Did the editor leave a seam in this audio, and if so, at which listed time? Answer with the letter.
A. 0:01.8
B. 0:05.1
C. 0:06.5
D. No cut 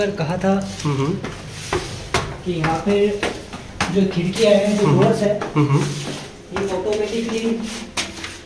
D